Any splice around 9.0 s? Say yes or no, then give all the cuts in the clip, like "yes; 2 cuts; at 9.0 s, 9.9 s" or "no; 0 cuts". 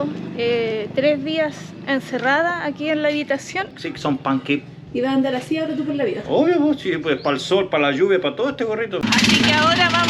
yes; 2 cuts; at 3.8 s, 9.0 s